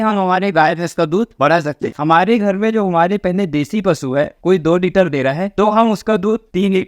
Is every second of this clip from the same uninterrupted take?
no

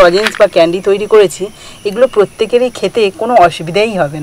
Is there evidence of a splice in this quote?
no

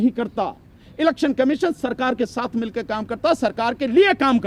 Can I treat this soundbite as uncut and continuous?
yes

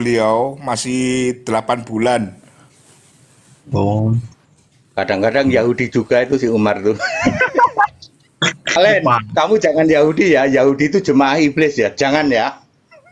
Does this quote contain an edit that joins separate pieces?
yes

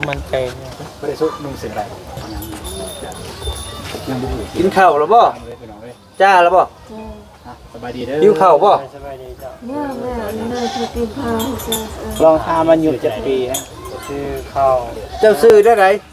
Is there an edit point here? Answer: yes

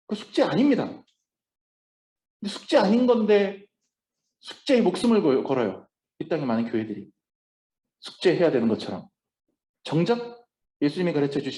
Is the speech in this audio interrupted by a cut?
no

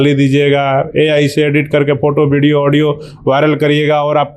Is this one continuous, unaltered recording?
yes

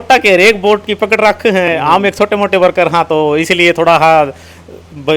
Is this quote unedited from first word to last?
yes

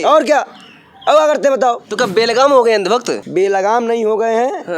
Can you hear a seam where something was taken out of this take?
yes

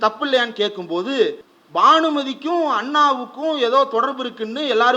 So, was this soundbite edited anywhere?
yes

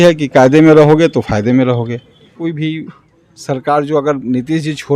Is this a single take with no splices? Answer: no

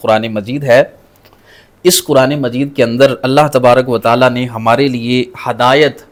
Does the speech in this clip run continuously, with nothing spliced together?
yes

